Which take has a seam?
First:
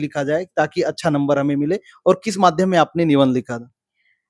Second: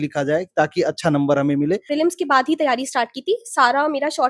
second; 1 cut; at 1.9 s

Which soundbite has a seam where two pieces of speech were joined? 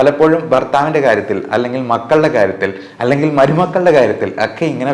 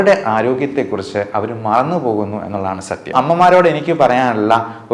second; 1 cut; at 3.1 s

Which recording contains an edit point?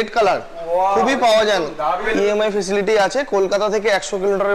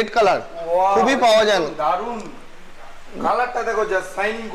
first; 1 cut; at 2.0 s

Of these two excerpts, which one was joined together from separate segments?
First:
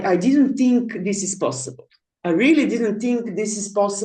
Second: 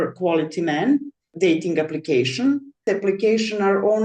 second; 2 cuts; at 1.2 s, 2.8 s

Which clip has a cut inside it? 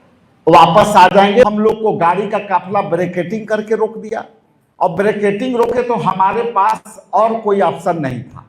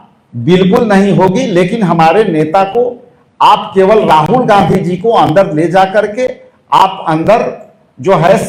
first; 1 cut; at 1.5 s

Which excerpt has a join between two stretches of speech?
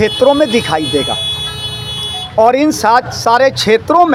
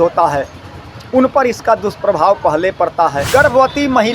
second; 1 cut; at 3.2 s

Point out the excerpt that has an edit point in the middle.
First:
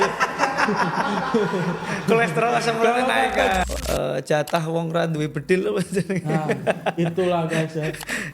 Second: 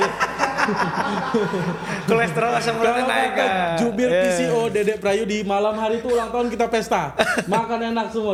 first; 1 cut; at 3.6 s

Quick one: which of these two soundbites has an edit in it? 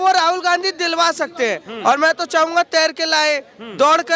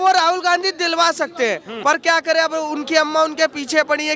second; 1 cut; at 1.7 s

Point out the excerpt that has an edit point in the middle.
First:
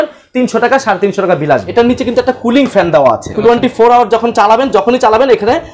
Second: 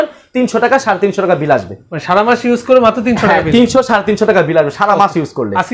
first; 2 cuts; at 1.7 s, 3.3 s

